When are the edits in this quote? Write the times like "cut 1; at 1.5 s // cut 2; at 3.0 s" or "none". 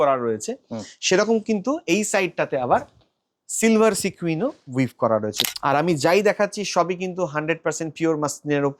cut 1; at 5.4 s